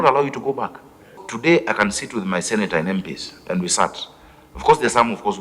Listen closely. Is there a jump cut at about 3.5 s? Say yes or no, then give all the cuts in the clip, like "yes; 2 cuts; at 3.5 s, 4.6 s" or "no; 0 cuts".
no; 1 cut; at 1.2 s